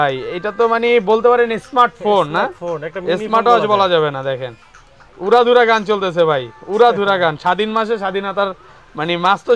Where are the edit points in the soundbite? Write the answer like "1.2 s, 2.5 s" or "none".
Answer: none